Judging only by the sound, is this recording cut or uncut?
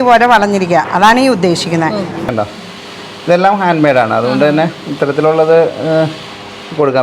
cut